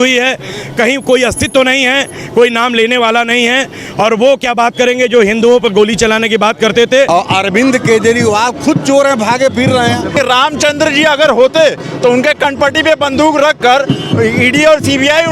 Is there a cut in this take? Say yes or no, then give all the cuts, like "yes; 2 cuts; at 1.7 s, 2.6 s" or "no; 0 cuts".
yes; 2 cuts; at 7.1 s, 10.1 s